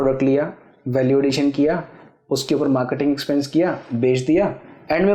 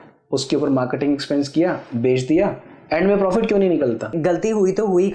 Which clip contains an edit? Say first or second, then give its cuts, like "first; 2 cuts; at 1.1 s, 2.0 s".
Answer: second; 1 cut; at 4.1 s